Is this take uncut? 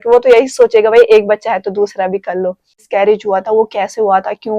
no; 1 cut; at 2.9 s

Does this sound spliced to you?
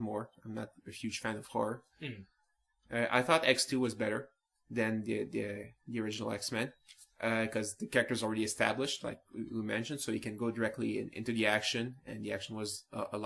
no; 0 cuts

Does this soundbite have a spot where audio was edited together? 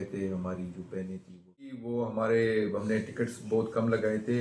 yes; 1 cut; at 1.8 s

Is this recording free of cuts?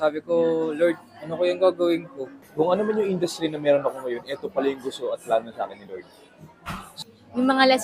no; 2 cuts; at 2.4 s, 6.9 s

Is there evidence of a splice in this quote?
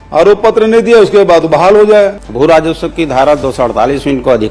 yes; 1 cut; at 2.2 s

